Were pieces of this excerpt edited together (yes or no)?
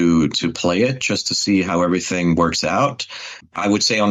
no